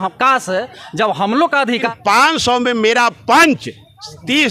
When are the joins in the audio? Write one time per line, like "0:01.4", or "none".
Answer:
0:01.8